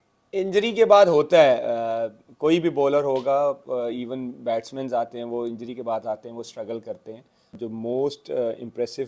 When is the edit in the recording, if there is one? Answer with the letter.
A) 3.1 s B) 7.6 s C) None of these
B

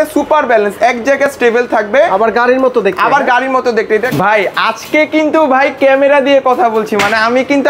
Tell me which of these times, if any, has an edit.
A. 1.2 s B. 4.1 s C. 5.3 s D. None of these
B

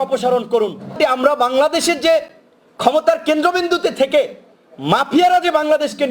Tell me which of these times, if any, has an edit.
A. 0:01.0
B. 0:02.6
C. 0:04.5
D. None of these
A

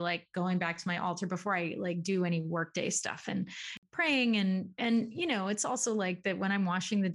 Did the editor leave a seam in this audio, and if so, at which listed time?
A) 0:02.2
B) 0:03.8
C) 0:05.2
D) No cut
B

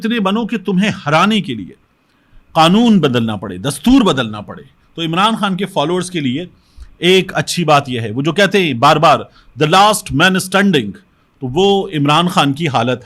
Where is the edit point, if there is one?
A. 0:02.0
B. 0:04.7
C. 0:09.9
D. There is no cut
D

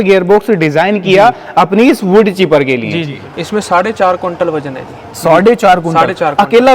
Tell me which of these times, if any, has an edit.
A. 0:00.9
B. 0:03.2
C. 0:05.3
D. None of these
B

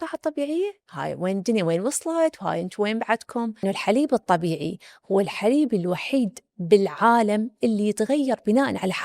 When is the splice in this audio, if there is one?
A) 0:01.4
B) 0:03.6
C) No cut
B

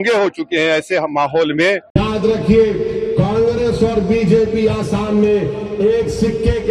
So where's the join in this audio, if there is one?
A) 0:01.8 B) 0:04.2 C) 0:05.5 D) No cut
A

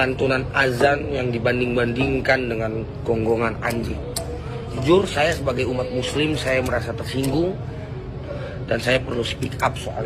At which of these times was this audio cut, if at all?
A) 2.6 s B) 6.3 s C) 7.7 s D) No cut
D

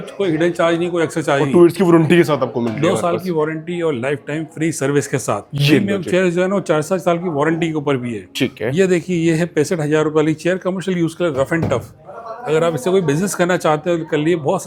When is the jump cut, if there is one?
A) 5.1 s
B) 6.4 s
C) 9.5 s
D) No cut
D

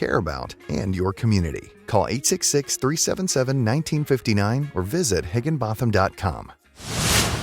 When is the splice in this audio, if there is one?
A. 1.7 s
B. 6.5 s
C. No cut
B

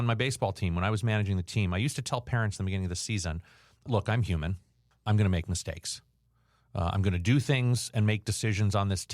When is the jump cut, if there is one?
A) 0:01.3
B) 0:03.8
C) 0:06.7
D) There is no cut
B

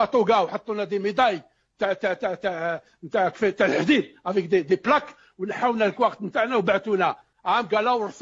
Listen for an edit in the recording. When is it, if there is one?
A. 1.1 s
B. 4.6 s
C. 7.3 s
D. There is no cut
C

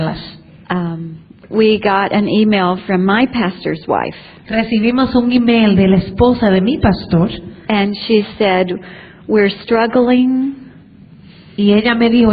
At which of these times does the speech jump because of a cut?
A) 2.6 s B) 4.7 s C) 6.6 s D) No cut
C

